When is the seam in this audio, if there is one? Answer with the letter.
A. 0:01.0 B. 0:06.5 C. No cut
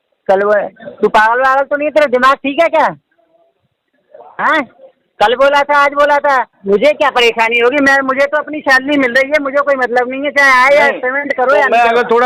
B